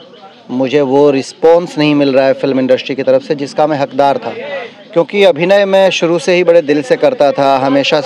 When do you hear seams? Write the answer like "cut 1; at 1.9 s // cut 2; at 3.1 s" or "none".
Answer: none

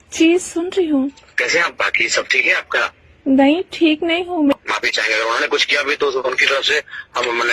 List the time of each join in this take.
cut 1; at 1.3 s // cut 2; at 3.0 s // cut 3; at 4.5 s

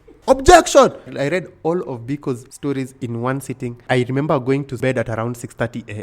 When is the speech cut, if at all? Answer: cut 1; at 1.1 s // cut 2; at 2.5 s // cut 3; at 3.8 s // cut 4; at 4.8 s

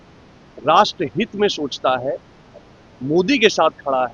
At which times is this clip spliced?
none

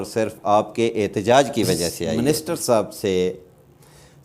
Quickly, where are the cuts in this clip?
cut 1; at 2.2 s

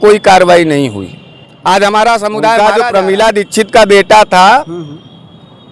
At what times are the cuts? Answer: cut 1; at 2.6 s

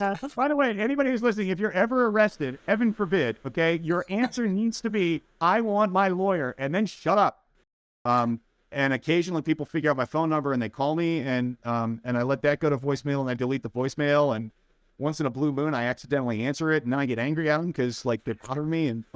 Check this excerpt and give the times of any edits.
cut 1; at 7.5 s

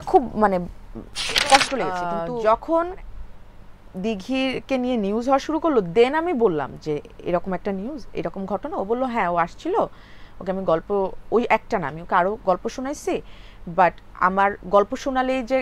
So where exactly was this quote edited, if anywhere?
cut 1; at 1.9 s

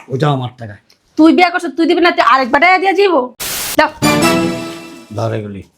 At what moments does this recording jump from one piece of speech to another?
cut 1; at 3.6 s

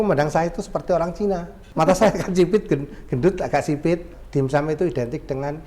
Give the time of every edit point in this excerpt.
cut 1; at 1.6 s // cut 2; at 4.1 s

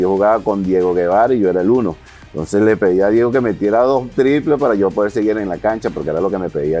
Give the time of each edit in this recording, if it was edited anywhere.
none

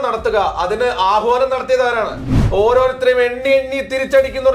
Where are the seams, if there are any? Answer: cut 1; at 2.3 s

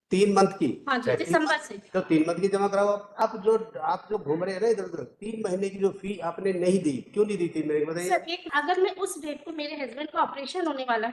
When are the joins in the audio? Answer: cut 1; at 3.2 s // cut 2; at 8.5 s

